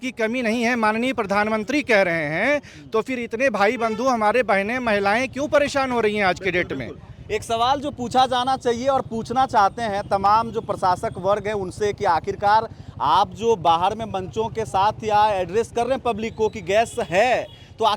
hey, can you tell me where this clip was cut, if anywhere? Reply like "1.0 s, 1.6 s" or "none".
none

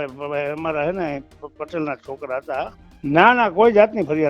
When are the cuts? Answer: 2.8 s

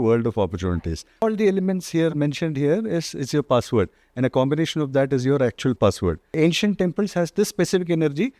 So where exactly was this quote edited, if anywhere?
1.2 s, 6.2 s

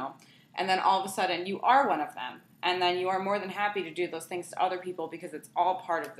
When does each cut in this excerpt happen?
none

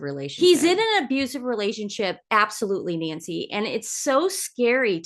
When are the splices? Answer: none

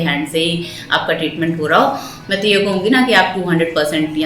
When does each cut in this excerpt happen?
2.1 s

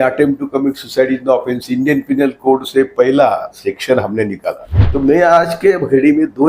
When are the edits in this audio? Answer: 4.7 s

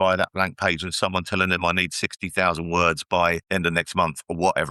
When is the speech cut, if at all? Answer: 3.4 s

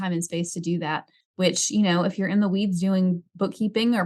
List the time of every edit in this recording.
1.2 s

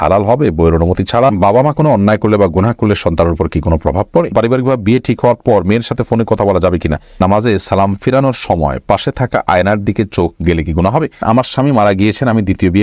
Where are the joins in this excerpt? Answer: 1.4 s, 4.3 s, 7.2 s, 11.2 s

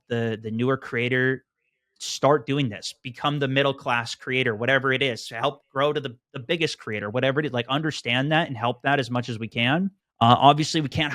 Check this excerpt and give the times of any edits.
10.0 s

